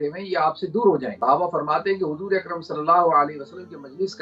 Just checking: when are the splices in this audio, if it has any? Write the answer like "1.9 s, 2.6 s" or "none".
1.1 s

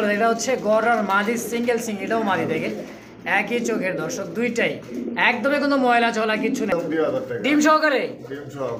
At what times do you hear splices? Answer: 6.7 s

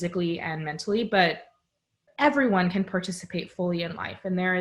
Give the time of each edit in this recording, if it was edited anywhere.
2.0 s

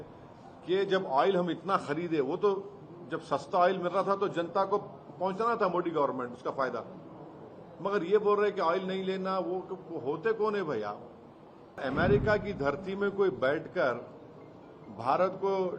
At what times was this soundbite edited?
11.8 s

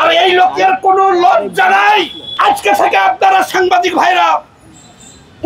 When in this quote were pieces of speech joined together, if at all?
2.2 s

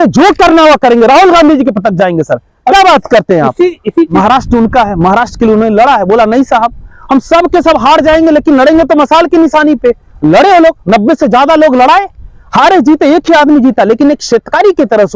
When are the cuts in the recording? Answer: 4.1 s

